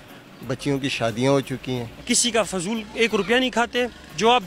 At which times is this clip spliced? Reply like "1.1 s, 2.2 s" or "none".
1.9 s